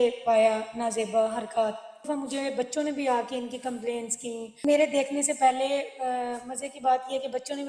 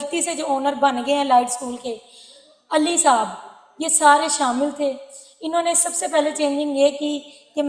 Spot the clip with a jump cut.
first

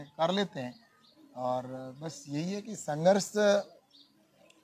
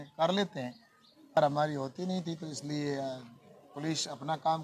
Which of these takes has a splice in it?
second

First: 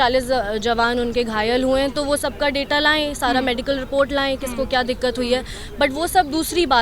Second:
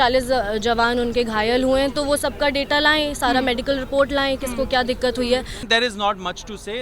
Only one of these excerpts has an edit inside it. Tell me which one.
second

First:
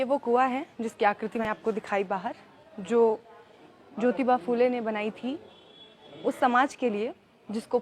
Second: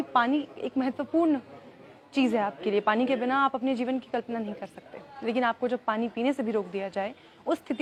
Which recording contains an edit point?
first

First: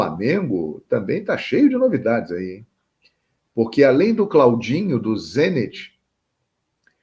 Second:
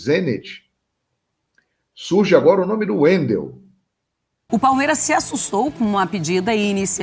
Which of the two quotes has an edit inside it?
second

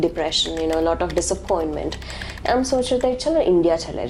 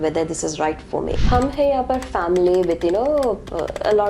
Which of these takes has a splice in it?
second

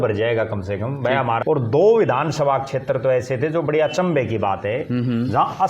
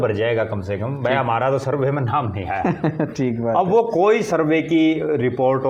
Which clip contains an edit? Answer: first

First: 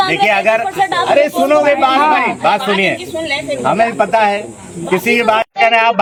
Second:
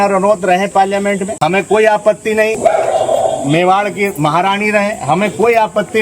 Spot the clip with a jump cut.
second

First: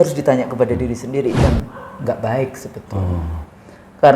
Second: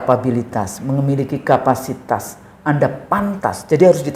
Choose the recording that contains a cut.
first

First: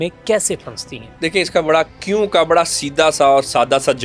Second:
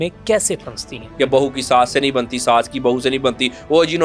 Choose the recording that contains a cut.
second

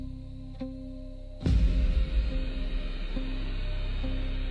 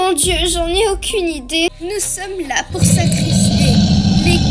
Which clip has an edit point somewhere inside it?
second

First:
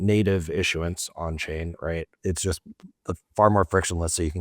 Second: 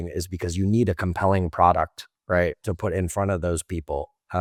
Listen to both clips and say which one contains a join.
first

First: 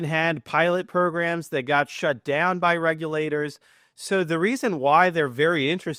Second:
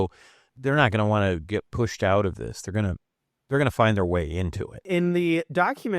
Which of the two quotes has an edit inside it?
second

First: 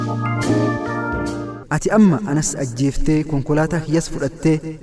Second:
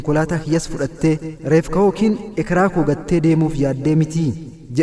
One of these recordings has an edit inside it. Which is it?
first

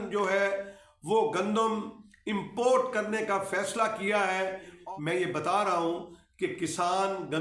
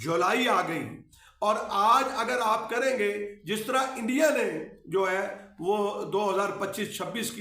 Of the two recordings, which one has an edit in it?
first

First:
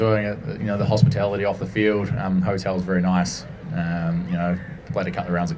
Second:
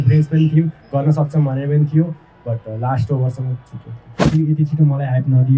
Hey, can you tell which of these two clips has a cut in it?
second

